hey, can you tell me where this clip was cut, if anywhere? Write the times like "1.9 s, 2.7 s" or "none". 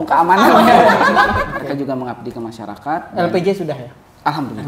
1.5 s